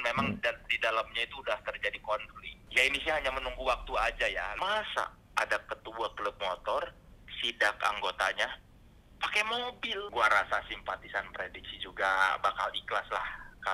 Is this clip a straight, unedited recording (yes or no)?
yes